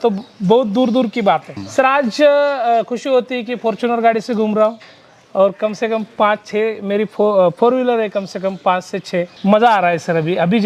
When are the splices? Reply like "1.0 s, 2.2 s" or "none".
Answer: 1.6 s, 9.3 s